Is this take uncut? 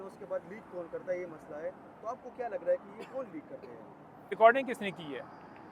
no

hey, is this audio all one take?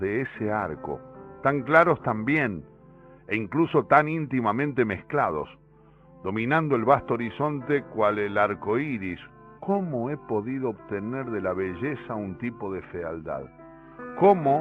yes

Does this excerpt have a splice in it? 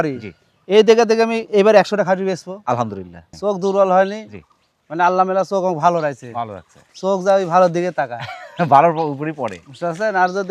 yes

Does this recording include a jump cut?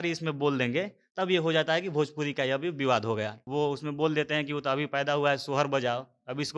yes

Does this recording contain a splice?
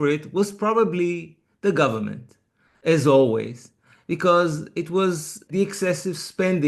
yes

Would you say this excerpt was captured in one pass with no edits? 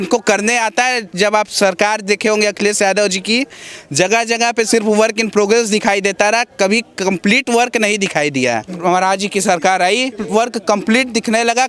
no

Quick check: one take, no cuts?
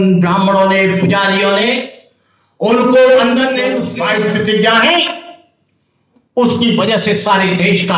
no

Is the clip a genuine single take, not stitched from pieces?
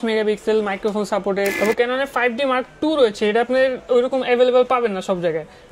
no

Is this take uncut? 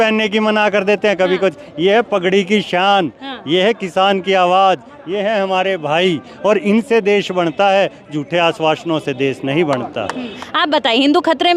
no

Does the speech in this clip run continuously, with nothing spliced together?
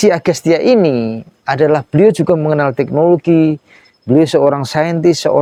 yes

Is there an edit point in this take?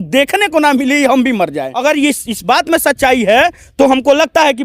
yes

